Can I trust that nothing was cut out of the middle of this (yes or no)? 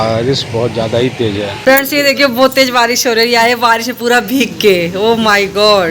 no